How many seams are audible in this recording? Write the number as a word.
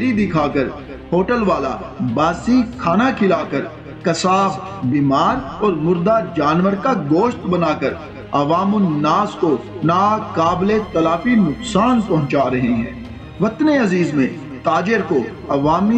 zero